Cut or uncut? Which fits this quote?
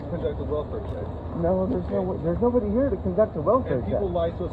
uncut